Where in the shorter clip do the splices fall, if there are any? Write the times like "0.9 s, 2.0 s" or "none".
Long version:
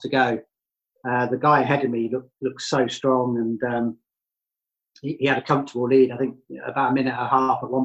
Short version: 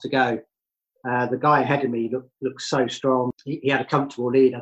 3.3 s